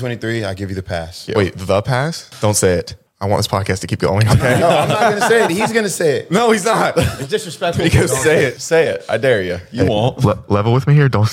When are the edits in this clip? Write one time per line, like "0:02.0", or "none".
0:01.2
0:02.2
0:07.1
0:08.6